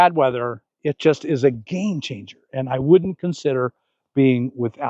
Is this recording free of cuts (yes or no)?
yes